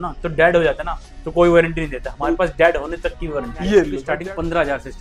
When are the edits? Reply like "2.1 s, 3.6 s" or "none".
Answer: 4.0 s

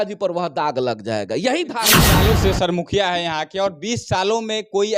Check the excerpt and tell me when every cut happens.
2.1 s

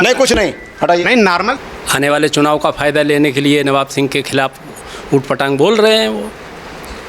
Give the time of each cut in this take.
1.6 s

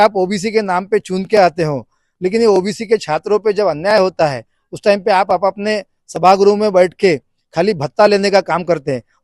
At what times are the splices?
none

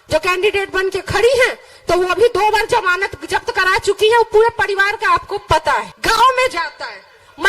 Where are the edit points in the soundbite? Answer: 5.9 s

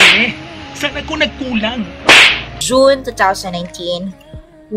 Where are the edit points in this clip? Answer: 2.6 s

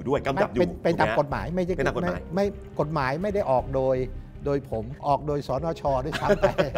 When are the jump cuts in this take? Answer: 4.9 s

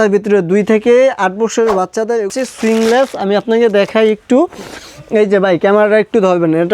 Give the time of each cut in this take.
2.3 s

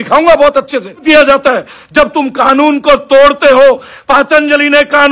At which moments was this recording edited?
1.0 s

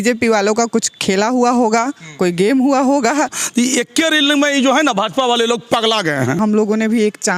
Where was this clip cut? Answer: 3.3 s, 6.4 s

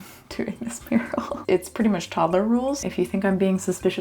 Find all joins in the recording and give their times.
1.3 s, 2.8 s

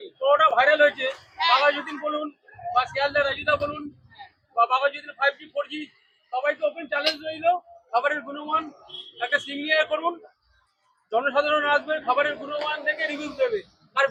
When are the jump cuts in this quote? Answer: none

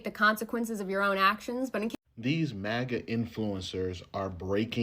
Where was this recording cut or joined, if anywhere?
1.9 s

